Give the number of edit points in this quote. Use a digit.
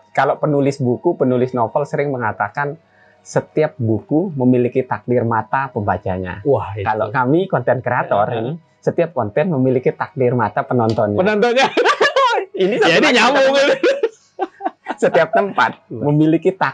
0